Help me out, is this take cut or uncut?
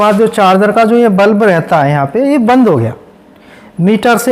uncut